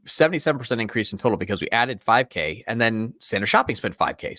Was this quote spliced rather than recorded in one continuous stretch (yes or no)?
no